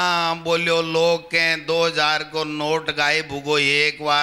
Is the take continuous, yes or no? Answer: yes